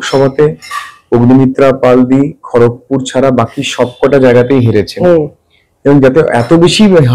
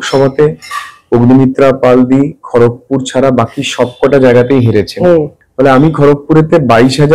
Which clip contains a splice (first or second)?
second